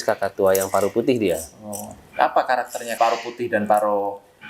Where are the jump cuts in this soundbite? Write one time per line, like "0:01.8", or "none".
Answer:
0:02.9